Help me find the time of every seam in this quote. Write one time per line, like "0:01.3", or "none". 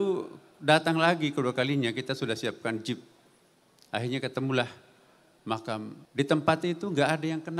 0:06.0